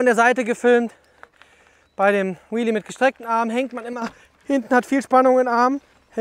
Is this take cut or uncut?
uncut